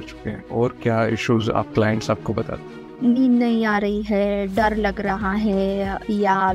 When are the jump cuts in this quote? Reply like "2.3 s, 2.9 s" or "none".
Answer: 1.7 s, 2.8 s